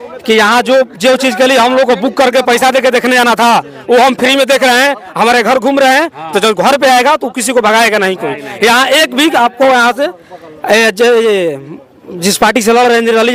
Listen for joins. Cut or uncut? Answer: uncut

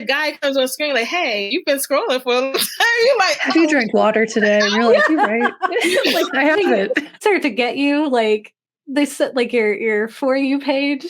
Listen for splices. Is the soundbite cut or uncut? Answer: cut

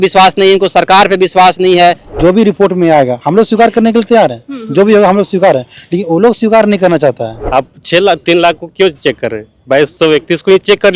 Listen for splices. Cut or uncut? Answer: cut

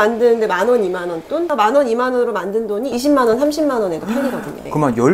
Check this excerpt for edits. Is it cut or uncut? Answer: cut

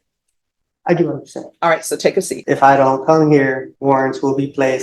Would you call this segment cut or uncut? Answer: cut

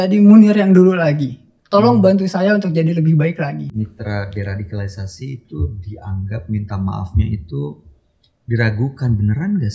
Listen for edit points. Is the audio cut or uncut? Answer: cut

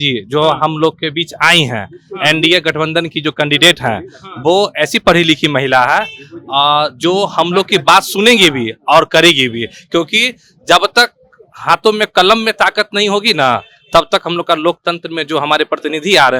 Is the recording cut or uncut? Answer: uncut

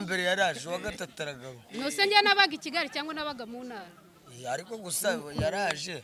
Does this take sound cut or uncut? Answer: uncut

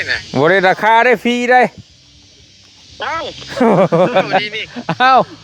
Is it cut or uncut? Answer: uncut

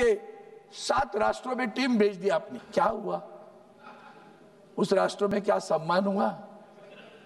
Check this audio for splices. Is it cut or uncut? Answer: cut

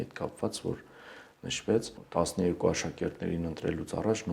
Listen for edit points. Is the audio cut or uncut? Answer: cut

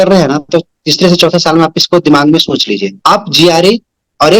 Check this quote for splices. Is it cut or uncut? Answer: cut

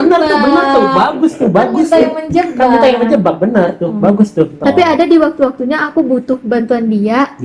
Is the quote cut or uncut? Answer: cut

